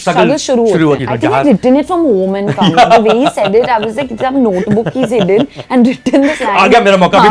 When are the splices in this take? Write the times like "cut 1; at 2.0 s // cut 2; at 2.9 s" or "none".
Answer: cut 1; at 1.0 s